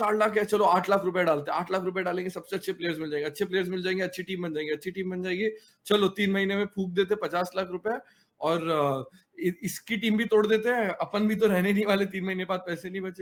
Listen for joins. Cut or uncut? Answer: uncut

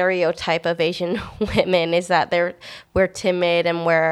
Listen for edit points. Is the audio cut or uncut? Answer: uncut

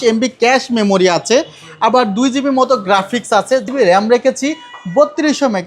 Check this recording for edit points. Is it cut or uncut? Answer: cut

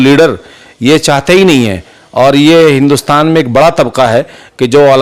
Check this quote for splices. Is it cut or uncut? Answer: uncut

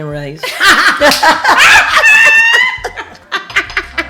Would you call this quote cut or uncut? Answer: uncut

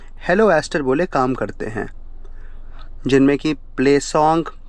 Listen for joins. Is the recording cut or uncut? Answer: uncut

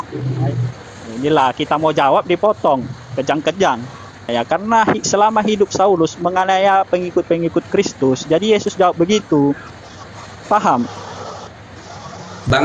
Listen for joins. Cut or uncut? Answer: cut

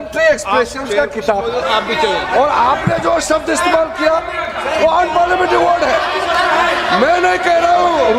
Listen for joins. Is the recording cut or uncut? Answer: uncut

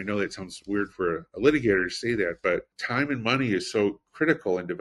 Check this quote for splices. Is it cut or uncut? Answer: cut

